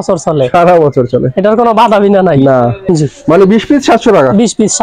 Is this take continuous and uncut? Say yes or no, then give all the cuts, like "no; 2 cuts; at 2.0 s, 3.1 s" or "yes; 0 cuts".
no; 1 cut; at 2.8 s